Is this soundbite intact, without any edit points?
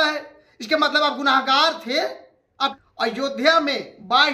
no; 1 cut; at 2.7 s

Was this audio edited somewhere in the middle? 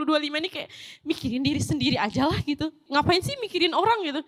no; 0 cuts

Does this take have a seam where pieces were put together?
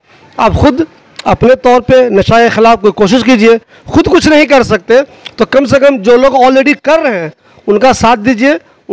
no; 0 cuts

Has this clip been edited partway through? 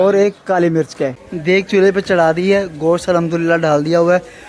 yes; 1 cut; at 1.3 s

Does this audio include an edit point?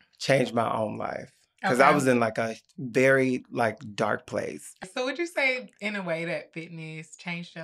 yes; 1 cut; at 4.8 s

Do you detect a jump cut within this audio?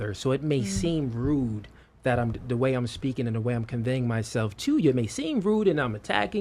no; 0 cuts

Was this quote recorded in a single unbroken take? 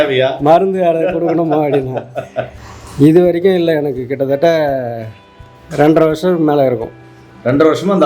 no; 1 cut; at 2.4 s

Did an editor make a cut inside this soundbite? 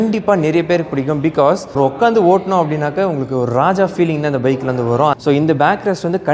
yes; 2 cuts; at 1.7 s, 5.2 s

